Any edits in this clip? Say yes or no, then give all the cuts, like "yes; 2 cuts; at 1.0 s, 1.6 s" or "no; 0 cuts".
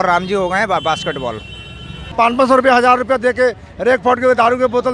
yes; 1 cut; at 2.0 s